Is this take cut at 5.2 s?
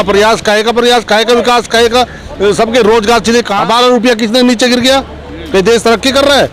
no; 1 cut; at 3.5 s

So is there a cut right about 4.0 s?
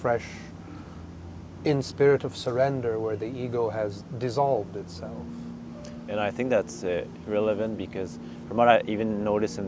yes; 1 cut; at 4.0 s

